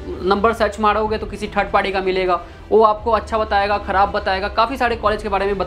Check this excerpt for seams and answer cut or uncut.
uncut